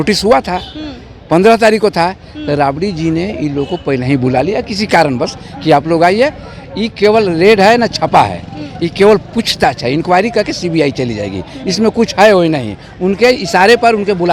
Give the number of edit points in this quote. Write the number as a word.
zero